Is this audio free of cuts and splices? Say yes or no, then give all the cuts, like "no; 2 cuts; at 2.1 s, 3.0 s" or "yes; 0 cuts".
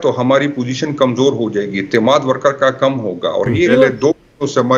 no; 1 cut; at 3.7 s